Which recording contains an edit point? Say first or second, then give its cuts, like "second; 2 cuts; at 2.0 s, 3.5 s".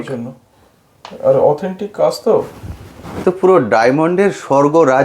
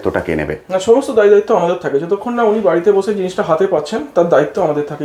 first; 1 cut; at 3.1 s